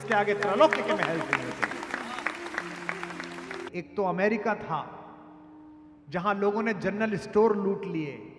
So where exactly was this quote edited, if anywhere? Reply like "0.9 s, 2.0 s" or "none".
3.6 s